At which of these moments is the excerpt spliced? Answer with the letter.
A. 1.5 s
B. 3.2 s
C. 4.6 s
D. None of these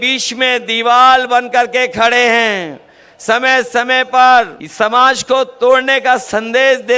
C